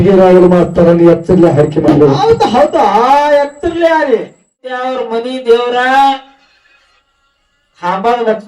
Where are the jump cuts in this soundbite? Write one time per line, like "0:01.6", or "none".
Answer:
0:04.8